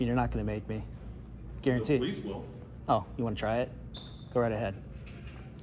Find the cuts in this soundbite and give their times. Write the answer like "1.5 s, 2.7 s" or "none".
none